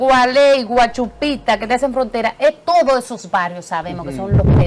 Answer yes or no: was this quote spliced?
no